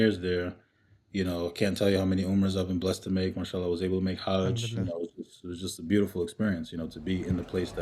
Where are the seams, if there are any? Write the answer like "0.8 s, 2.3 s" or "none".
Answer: none

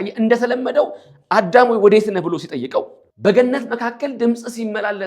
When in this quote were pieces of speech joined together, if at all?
3.0 s

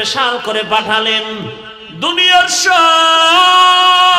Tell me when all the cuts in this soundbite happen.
1.8 s

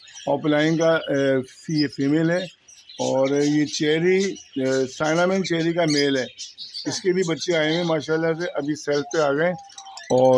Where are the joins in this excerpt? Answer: none

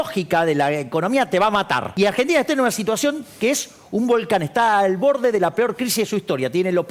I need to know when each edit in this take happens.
1.9 s

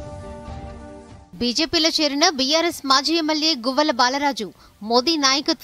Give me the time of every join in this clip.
1.1 s

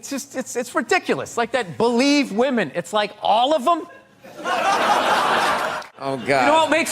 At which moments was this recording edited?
5.8 s

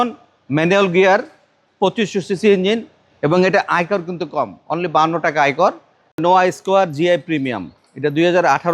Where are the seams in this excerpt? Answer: 6.1 s

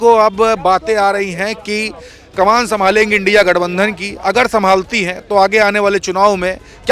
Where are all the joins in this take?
none

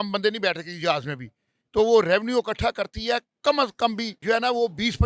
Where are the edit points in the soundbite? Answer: 4.1 s

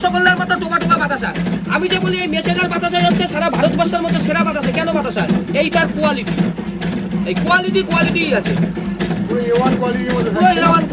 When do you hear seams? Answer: none

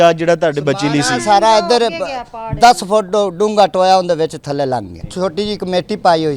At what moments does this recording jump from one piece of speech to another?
5.0 s

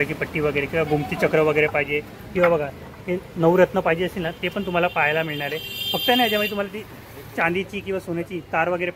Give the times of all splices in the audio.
none

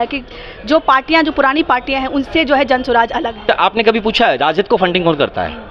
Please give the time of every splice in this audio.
3.4 s

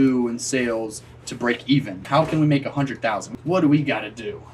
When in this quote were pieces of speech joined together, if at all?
2.0 s, 3.3 s

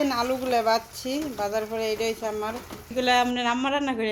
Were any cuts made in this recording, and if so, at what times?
2.9 s

